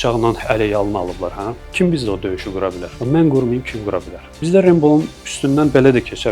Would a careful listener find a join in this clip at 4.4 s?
yes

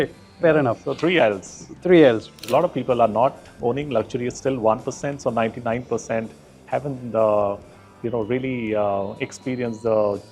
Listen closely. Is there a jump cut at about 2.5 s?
yes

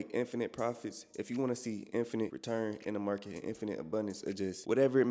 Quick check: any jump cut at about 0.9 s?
no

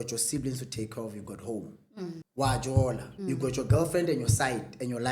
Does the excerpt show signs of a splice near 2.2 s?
yes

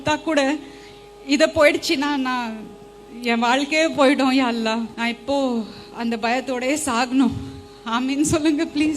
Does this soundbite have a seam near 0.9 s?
no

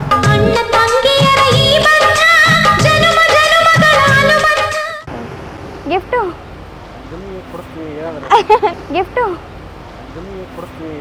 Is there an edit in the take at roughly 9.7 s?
no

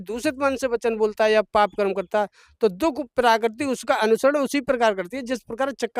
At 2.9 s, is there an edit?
no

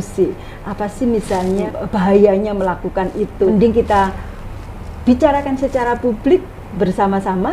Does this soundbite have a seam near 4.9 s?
no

